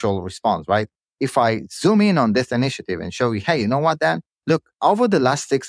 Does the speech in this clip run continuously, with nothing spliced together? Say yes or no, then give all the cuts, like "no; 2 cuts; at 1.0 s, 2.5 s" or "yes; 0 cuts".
no; 1 cut; at 4.7 s